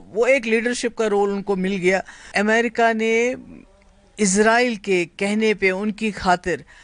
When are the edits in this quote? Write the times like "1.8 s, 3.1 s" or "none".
2.2 s